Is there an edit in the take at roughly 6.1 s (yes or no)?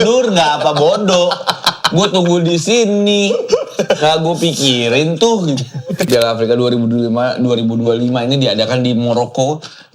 yes